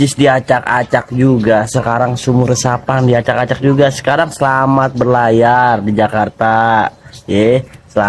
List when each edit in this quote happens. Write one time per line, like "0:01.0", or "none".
none

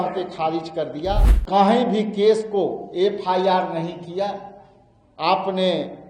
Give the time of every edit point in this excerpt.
0:01.3

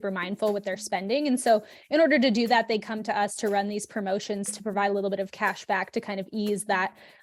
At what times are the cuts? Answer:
none

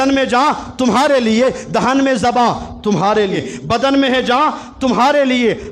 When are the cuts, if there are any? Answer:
0:03.5

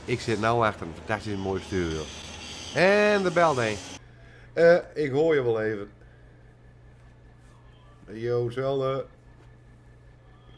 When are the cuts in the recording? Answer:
none

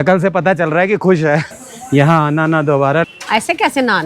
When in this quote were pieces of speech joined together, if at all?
0:01.5
0:03.1

